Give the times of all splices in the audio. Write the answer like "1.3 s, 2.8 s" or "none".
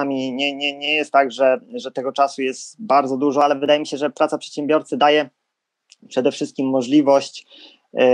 none